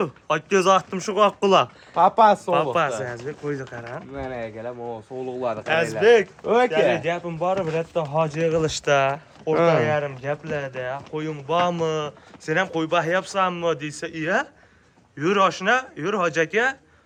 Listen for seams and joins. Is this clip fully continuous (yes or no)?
yes